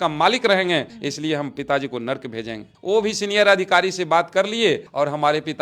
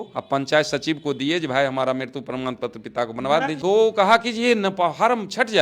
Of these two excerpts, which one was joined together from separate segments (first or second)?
second